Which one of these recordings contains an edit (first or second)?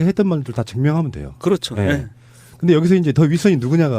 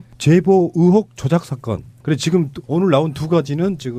first